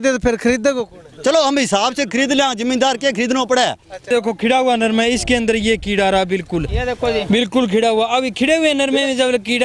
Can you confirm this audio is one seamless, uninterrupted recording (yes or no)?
no